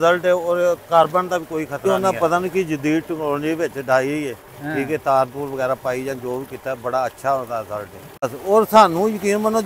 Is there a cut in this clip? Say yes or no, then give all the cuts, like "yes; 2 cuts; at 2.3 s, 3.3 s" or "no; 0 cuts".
yes; 2 cuts; at 1.9 s, 8.4 s